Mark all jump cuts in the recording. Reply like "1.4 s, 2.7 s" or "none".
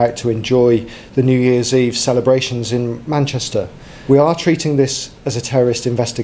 3.9 s